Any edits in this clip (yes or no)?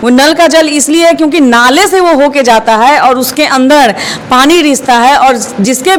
no